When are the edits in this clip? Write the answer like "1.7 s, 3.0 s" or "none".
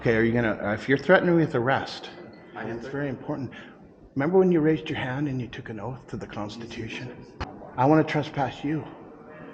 2.8 s, 7.4 s

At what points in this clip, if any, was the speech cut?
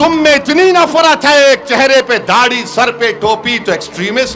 none

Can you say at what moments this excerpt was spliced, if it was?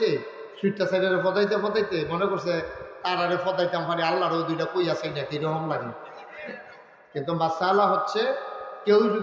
none

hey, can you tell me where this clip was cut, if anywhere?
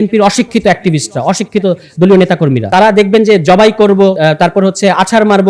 2.6 s, 4.2 s

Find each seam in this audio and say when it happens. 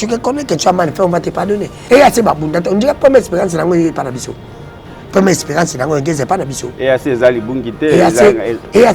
1.7 s

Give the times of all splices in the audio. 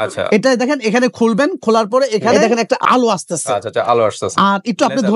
2.3 s

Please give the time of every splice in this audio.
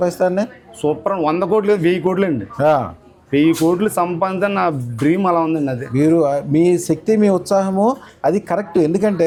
none

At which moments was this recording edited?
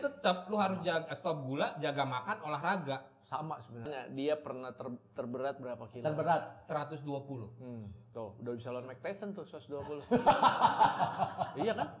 3.9 s

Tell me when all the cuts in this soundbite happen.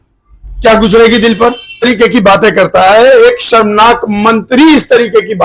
1.9 s

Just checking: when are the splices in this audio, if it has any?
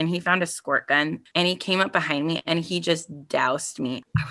1.2 s

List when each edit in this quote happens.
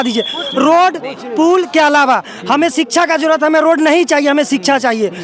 none

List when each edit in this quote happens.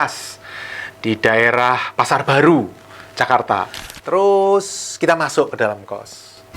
3.8 s

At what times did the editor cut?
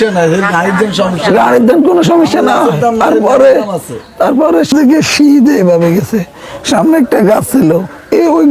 4.7 s

